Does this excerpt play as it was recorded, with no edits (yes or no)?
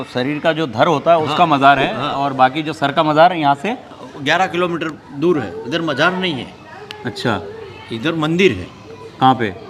yes